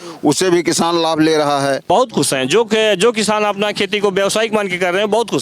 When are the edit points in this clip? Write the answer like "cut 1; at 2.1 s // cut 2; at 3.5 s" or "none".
cut 1; at 1.8 s